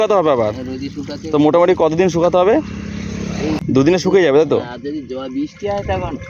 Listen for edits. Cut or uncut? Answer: cut